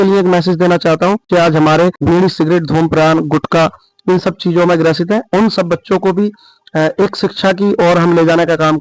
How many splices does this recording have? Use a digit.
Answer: 2